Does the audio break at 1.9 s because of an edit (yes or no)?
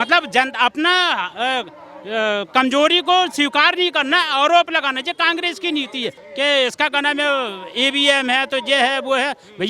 no